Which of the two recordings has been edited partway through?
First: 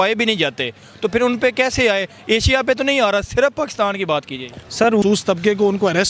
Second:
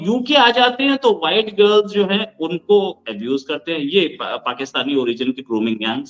first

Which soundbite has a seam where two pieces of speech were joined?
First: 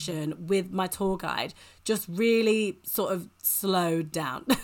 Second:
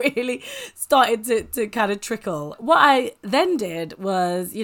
second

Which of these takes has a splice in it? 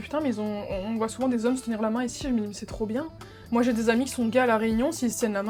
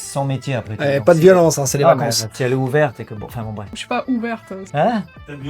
second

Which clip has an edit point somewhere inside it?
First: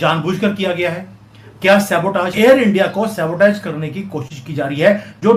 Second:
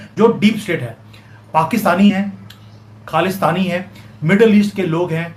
first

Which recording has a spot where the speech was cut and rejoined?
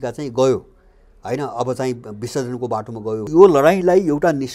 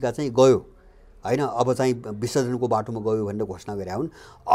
first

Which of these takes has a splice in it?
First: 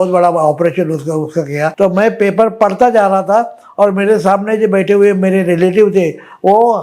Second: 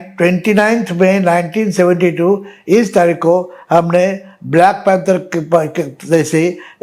first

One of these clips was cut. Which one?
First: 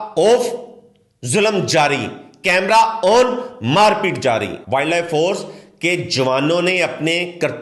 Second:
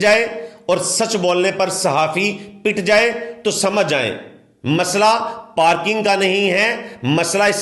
first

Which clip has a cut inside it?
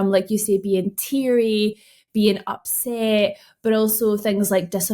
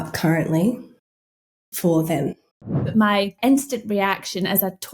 second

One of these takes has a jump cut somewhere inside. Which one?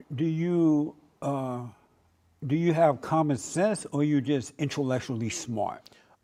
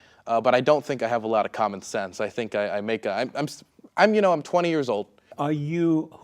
second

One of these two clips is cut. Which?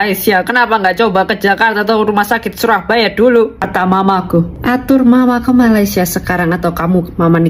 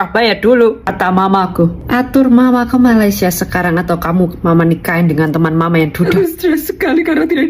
second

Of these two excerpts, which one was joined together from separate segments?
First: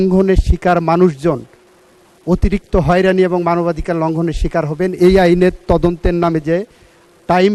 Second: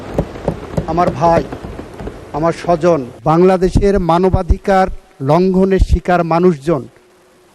second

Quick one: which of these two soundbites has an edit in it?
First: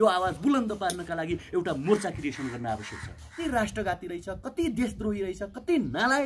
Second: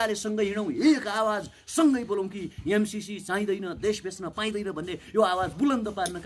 first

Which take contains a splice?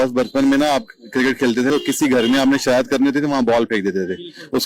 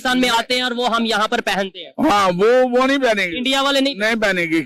first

